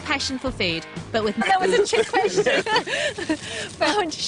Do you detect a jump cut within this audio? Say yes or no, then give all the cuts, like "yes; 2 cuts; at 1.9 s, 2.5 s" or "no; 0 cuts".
no; 0 cuts